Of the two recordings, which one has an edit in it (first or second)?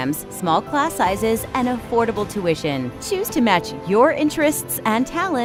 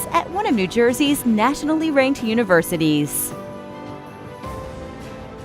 second